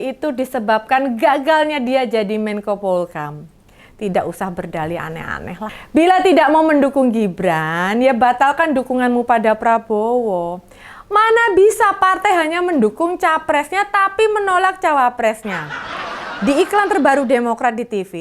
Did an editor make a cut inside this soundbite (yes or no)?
yes